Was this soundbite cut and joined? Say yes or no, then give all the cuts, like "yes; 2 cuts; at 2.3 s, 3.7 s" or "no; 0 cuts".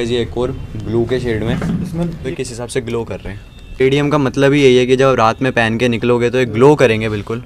yes; 2 cuts; at 2.3 s, 3.8 s